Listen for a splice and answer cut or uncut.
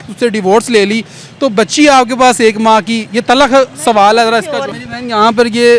cut